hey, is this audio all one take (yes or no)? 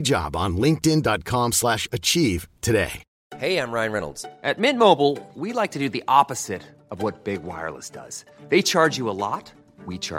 yes